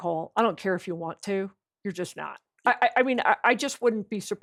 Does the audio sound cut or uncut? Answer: uncut